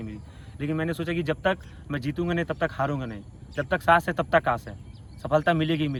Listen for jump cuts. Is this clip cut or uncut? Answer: uncut